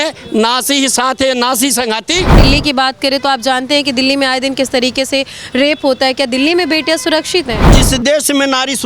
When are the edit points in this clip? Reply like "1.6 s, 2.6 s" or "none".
2.4 s, 7.7 s